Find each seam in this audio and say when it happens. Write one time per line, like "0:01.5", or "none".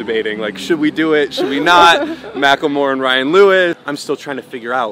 0:03.8